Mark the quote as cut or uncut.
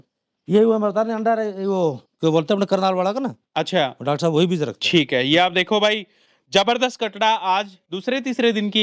uncut